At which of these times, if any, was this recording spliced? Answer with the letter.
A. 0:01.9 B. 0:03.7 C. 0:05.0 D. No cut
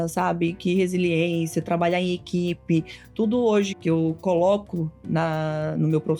B